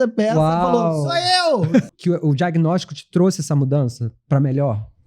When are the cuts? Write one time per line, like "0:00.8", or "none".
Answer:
0:01.9